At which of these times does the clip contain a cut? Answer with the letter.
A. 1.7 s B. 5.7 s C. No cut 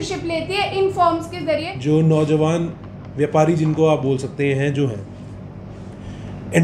A